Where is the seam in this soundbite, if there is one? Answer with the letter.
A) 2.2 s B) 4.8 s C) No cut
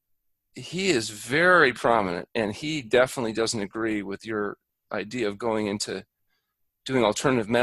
C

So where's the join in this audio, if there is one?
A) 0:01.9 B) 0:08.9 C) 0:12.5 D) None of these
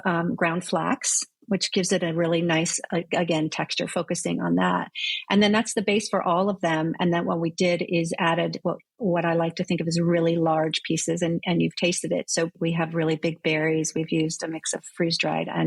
C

